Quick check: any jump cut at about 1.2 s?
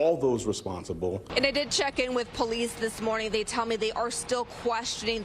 yes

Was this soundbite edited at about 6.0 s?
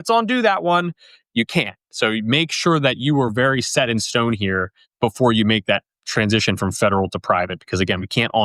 yes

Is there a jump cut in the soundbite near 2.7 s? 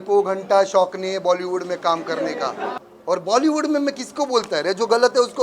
yes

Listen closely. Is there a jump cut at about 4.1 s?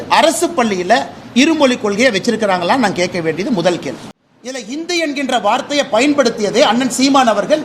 yes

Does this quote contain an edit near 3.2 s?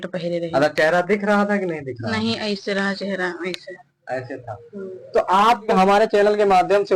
no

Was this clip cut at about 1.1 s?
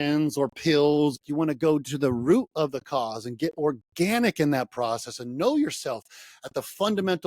yes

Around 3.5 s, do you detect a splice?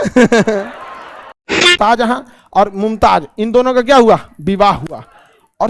no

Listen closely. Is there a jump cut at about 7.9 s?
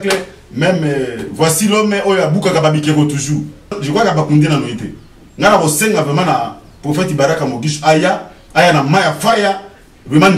no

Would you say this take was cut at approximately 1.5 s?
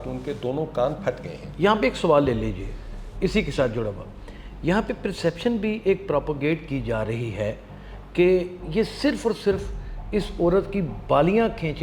no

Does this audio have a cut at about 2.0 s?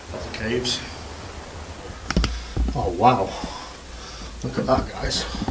yes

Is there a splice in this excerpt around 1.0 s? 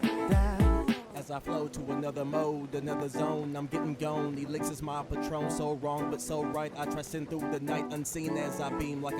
yes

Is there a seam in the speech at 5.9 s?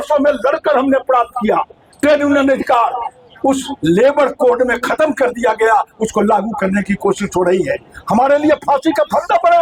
no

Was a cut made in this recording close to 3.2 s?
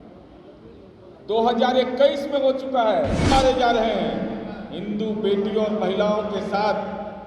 yes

